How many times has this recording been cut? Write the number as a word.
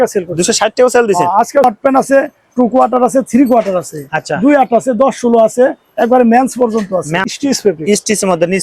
two